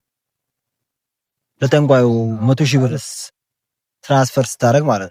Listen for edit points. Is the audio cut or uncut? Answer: uncut